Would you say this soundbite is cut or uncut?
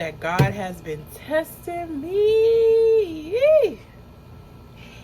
uncut